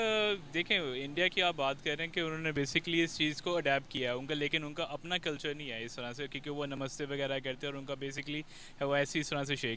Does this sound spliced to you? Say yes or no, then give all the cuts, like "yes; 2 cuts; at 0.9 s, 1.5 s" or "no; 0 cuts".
no; 0 cuts